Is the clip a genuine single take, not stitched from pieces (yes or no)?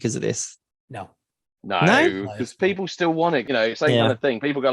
no